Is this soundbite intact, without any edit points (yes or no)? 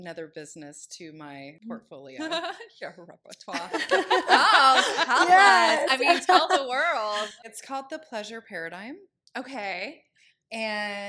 no